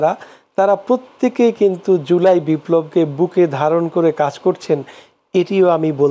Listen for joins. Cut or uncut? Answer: uncut